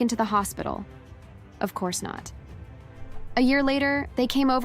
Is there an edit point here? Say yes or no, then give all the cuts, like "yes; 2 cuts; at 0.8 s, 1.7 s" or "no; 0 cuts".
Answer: yes; 1 cut; at 1.2 s